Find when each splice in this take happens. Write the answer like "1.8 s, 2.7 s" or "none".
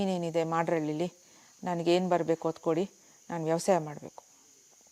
none

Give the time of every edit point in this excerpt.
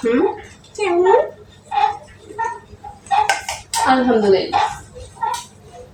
none

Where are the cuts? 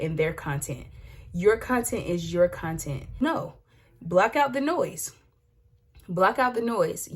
3.0 s

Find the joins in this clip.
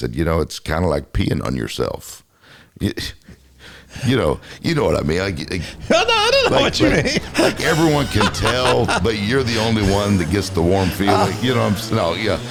none

